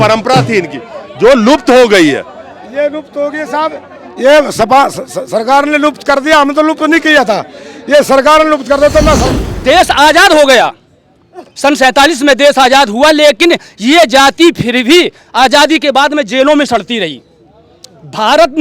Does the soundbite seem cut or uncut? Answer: cut